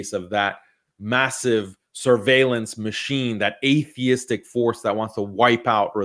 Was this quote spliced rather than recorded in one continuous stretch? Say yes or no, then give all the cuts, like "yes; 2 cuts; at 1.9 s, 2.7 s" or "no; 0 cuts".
no; 0 cuts